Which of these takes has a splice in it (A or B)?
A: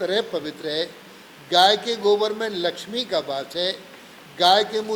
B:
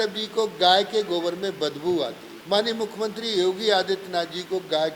B